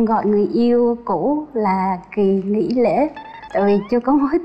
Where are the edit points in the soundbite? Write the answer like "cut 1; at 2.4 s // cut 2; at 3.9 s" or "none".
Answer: none